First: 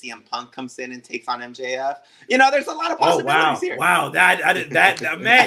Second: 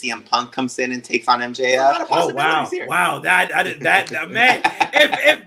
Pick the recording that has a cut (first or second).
second